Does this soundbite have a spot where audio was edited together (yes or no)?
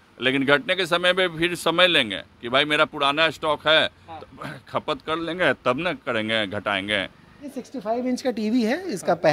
yes